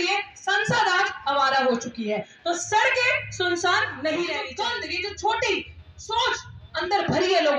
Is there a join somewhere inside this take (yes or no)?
yes